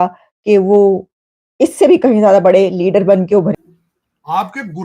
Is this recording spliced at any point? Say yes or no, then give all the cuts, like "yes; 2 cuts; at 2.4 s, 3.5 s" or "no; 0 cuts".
yes; 1 cut; at 3.6 s